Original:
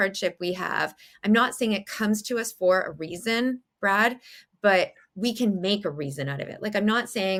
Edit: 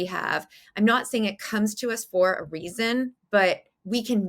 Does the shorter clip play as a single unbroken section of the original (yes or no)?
no